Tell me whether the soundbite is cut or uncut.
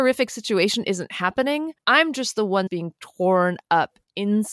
cut